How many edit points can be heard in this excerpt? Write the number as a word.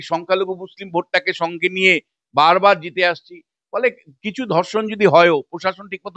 zero